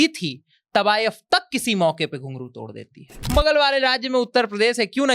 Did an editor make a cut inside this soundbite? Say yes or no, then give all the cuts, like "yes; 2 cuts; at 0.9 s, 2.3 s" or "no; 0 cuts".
yes; 1 cut; at 3.2 s